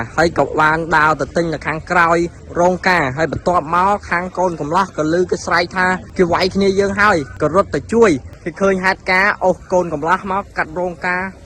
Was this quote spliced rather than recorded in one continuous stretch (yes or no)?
yes